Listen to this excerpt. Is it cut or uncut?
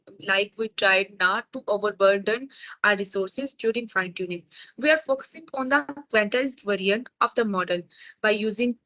uncut